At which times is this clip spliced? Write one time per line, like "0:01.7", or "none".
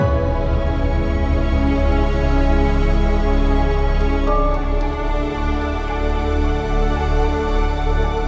none